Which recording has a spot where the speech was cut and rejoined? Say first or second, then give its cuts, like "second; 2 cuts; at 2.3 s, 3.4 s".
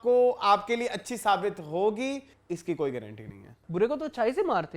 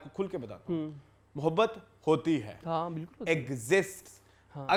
first; 2 cuts; at 2.3 s, 3.6 s